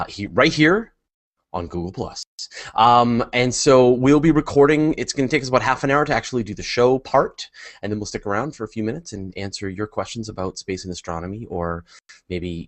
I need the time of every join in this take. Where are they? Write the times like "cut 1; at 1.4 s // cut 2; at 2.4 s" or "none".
cut 1; at 5.5 s